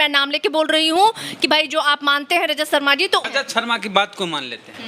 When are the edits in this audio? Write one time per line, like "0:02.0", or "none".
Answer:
0:03.2